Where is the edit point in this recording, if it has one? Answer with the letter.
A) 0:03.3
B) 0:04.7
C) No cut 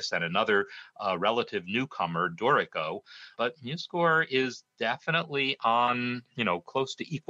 A